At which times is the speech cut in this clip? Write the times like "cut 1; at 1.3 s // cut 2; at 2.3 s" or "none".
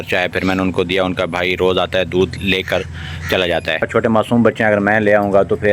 cut 1; at 3.9 s

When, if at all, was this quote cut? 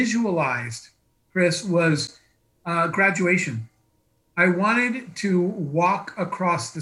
none

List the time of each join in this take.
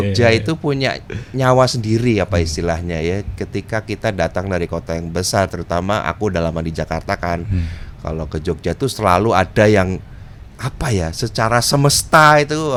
none

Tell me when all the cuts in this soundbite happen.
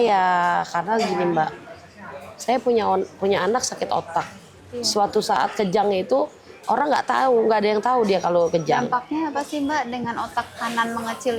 none

